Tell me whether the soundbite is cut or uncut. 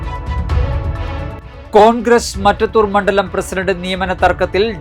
cut